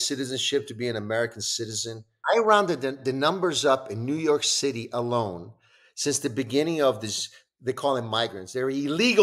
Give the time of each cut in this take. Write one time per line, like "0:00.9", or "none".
0:02.2